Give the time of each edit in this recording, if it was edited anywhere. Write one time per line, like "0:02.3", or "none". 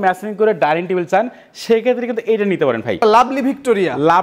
0:03.0